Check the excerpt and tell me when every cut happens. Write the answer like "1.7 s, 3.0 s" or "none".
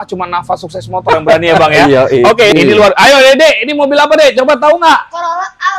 2.5 s